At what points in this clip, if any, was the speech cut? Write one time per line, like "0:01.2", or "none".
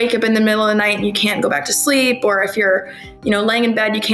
none